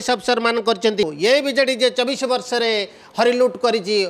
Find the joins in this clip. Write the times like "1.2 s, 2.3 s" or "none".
1.0 s